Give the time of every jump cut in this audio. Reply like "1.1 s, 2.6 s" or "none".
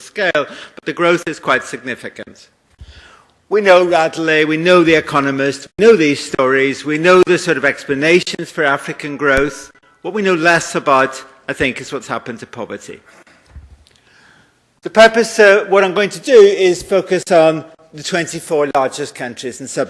4.8 s

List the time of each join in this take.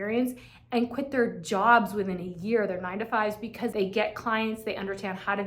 3.7 s

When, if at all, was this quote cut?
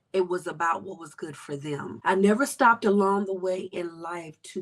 1.9 s

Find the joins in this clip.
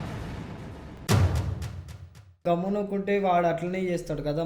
2.4 s

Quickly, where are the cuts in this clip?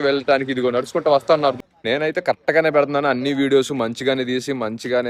1.6 s

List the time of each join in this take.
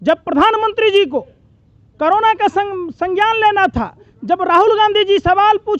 none

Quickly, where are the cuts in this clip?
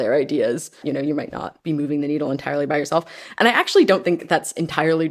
0.8 s, 1.5 s

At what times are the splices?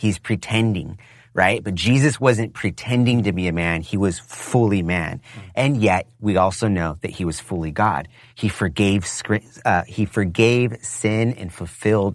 none

